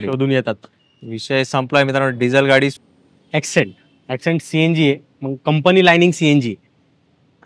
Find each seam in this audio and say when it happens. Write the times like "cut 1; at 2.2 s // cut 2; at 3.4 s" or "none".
cut 1; at 2.8 s

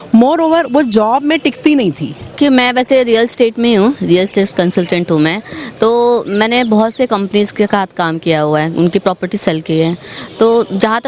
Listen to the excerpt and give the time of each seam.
cut 1; at 2.4 s

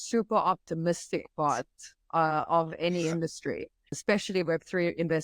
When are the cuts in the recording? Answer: cut 1; at 4.0 s

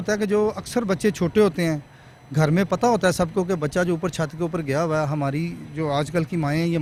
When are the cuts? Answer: none

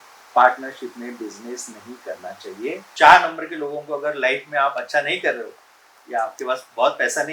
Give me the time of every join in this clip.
cut 1; at 2.9 s

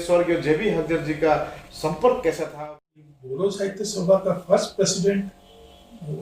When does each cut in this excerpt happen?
cut 1; at 2.6 s

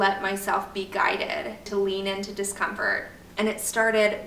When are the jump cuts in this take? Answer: cut 1; at 1.7 s // cut 2; at 3.2 s

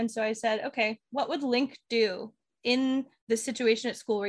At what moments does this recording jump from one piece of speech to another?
cut 1; at 2.4 s // cut 2; at 3.1 s

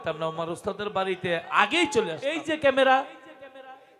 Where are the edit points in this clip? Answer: cut 1; at 2.3 s

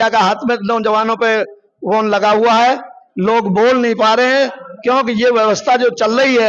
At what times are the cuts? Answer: none

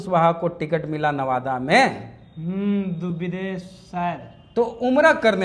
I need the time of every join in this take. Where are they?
none

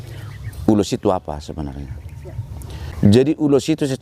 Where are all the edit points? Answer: cut 1; at 2.9 s

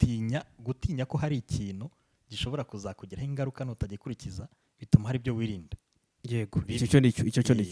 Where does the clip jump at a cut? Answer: none

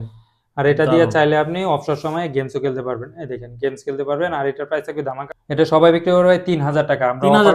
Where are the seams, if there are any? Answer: cut 1; at 5.2 s

